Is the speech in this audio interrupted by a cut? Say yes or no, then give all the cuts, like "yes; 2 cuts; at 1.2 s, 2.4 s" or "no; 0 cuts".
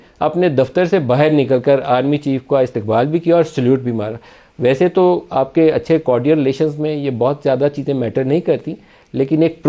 no; 0 cuts